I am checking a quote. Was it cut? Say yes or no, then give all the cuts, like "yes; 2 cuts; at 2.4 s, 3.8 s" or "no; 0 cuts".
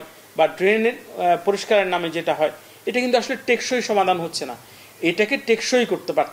no; 0 cuts